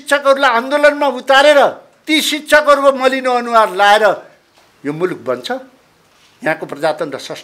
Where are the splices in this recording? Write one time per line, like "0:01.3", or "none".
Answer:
0:01.9